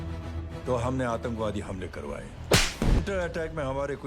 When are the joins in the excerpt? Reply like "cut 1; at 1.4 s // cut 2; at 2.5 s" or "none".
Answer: cut 1; at 3.0 s